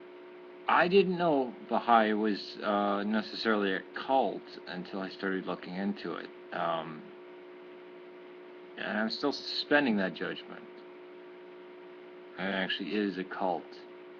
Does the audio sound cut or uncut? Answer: cut